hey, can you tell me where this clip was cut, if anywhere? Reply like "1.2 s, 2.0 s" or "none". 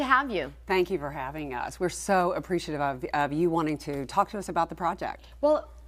3.8 s